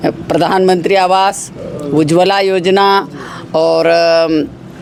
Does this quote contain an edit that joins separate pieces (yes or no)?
no